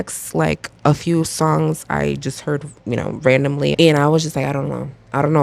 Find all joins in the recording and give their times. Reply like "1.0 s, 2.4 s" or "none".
3.7 s